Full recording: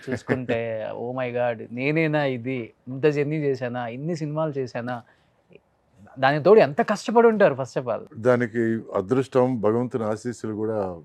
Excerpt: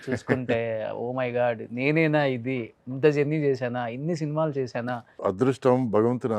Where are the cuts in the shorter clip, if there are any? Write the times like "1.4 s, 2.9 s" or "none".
5.1 s